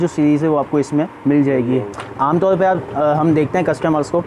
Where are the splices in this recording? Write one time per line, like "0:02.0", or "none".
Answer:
0:01.1
0:02.0